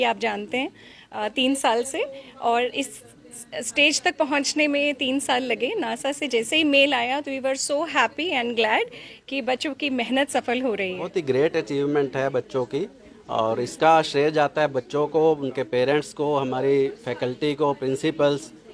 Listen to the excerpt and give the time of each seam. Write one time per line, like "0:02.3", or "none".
0:11.0